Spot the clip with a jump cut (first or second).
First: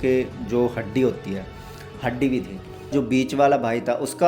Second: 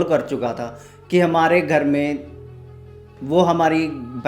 first